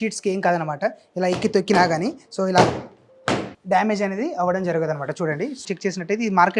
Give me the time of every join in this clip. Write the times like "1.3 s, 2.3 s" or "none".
5.6 s